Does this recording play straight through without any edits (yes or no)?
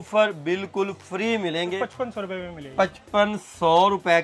no